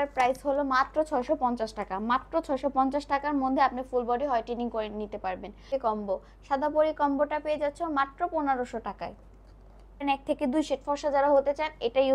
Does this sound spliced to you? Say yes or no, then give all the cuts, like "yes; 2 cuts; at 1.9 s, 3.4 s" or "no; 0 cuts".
yes; 2 cuts; at 5.7 s, 10.0 s